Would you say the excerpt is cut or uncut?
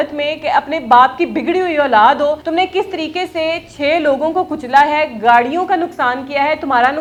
uncut